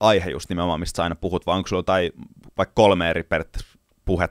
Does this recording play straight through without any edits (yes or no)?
yes